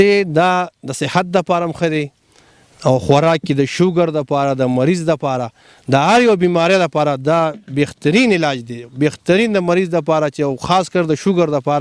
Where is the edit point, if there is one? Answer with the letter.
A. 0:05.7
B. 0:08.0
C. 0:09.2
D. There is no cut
D